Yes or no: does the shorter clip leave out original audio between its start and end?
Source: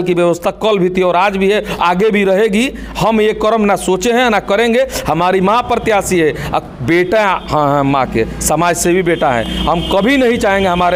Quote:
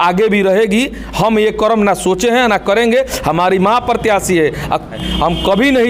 yes